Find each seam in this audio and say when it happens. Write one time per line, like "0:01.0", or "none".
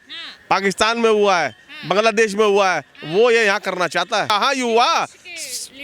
0:04.3